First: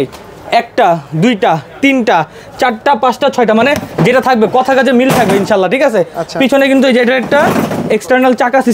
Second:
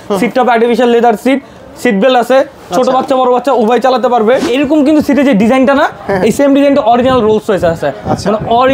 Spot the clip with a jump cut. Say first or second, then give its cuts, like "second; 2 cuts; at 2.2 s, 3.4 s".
second; 1 cut; at 4.5 s